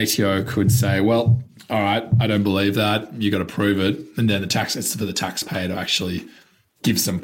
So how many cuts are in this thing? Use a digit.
0